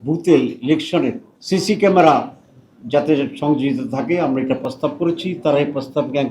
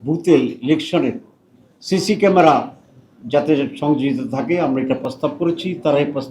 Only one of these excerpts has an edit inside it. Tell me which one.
first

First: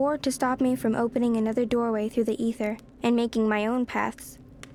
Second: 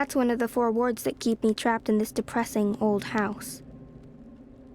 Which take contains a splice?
second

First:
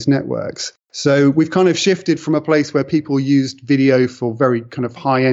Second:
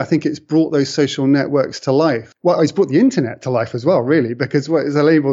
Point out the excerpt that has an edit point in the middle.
second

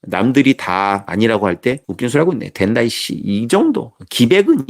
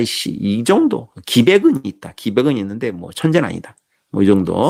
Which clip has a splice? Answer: first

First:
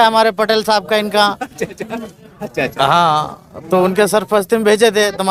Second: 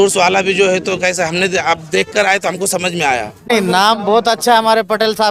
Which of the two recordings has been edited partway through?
second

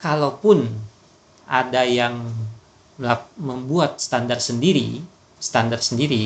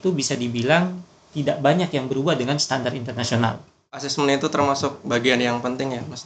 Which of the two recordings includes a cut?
second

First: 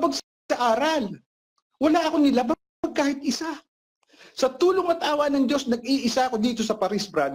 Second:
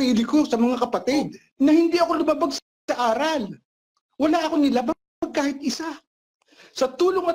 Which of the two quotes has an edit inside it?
second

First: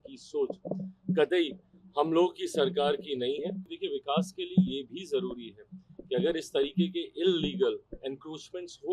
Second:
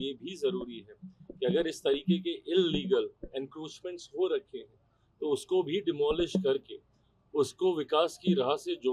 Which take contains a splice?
first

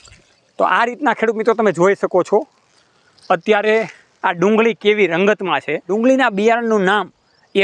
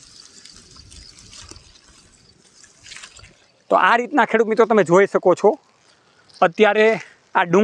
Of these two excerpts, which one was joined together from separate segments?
first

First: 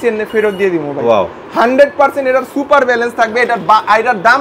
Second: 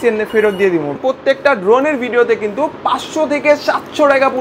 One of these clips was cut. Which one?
second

